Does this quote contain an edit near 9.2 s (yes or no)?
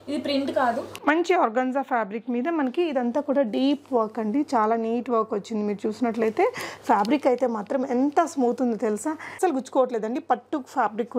yes